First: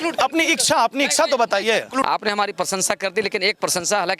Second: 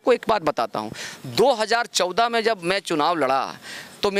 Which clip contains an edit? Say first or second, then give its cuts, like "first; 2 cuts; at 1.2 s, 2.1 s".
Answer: first; 1 cut; at 2.0 s